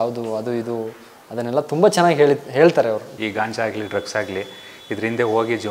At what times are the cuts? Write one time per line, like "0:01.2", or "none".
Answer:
0:03.1